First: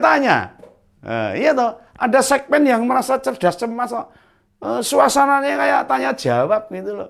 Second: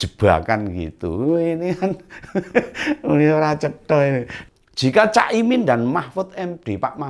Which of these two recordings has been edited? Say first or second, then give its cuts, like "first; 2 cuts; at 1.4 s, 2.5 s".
second; 1 cut; at 4.3 s